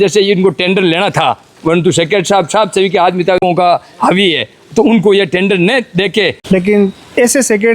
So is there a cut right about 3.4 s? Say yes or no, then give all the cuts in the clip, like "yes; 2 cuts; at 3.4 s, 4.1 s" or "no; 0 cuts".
yes; 2 cuts; at 3.4 s, 6.4 s